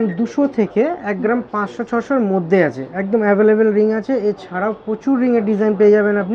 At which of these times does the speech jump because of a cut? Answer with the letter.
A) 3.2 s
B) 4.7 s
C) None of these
C